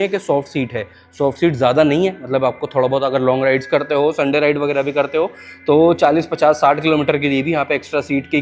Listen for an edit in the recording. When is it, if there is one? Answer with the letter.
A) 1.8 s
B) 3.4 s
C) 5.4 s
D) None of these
D